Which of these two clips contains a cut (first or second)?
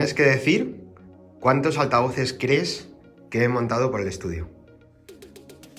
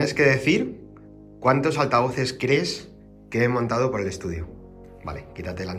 second